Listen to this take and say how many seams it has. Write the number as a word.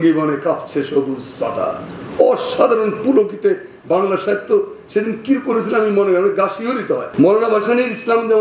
one